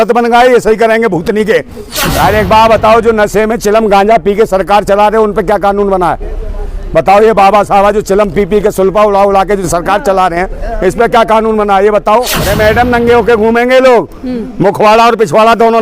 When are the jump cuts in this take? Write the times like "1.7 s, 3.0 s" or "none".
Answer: 1.9 s, 12.5 s